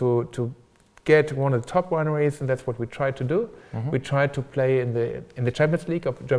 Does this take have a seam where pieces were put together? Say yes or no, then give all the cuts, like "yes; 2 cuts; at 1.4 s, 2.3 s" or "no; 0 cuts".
yes; 1 cut; at 4.4 s